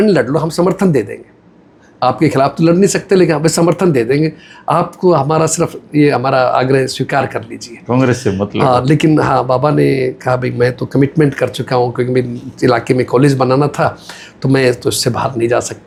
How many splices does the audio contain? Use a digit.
0